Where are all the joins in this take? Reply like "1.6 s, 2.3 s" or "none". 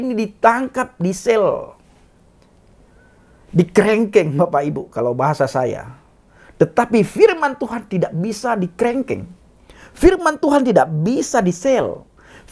none